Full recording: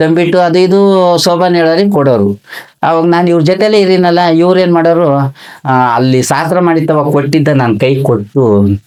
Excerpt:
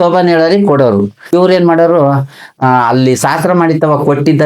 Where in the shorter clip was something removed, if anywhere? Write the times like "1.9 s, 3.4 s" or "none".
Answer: 1.3 s

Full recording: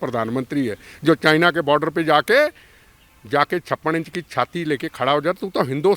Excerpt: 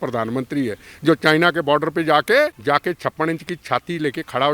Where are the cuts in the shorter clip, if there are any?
2.6 s

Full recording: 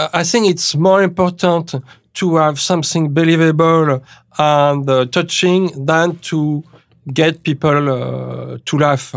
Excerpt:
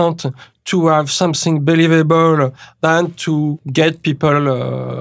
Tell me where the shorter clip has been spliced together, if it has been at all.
2.7 s, 3.6 s

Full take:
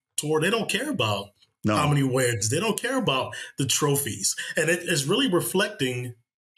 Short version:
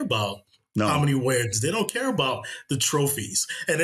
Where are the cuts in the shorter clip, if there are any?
none

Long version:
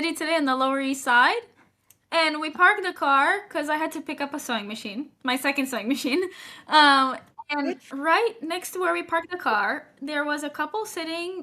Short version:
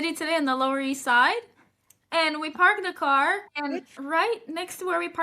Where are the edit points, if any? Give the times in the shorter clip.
3.5 s

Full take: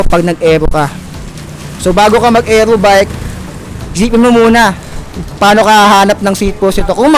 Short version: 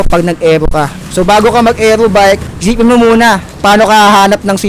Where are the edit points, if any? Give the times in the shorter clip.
1.0 s, 2.5 s, 3.5 s

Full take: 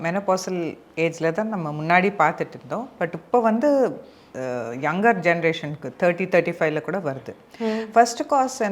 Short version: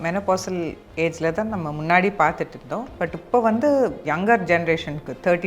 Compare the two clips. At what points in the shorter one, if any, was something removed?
4.0 s

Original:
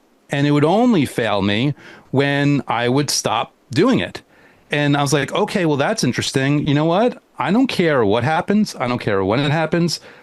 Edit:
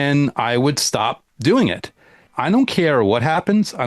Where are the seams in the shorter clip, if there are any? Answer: 2.3 s

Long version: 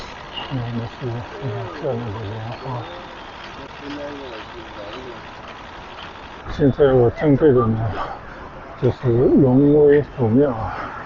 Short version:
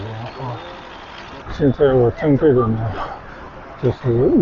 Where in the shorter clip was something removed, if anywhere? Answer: 1.4 s

